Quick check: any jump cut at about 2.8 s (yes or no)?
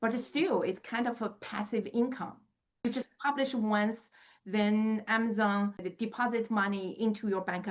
yes